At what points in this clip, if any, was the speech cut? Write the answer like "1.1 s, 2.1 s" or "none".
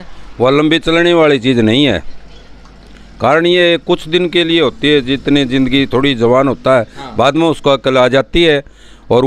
none